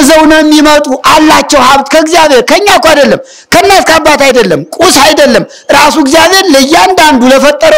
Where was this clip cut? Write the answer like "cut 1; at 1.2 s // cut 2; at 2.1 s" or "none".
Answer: none

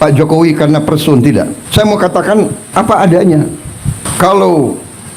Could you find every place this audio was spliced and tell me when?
cut 1; at 1.6 s // cut 2; at 2.6 s // cut 3; at 4.1 s

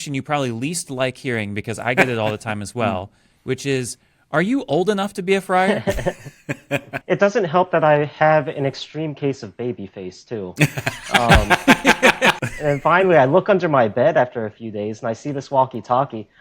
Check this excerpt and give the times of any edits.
cut 1; at 7.0 s // cut 2; at 12.4 s

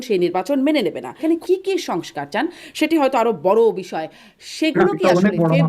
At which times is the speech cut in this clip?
cut 1; at 1.1 s

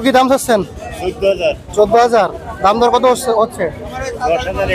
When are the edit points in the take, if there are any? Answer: none

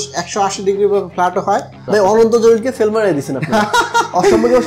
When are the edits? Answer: cut 1; at 1.8 s

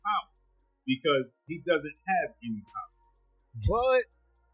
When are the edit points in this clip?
cut 1; at 3.5 s

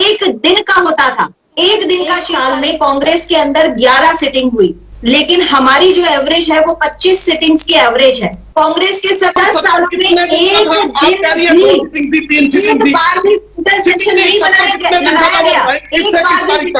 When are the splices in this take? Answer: cut 1; at 2.3 s // cut 2; at 8.5 s // cut 3; at 9.4 s

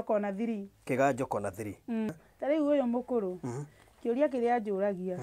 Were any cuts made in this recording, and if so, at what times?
cut 1; at 2.1 s

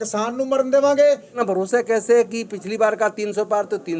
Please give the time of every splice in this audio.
cut 1; at 1.3 s

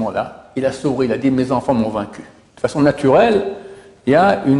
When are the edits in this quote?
cut 1; at 2.4 s

